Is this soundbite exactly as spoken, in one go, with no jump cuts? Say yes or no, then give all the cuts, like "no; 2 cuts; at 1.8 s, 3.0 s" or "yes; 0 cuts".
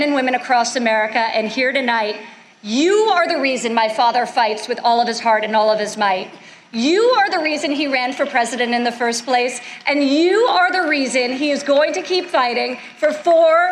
yes; 0 cuts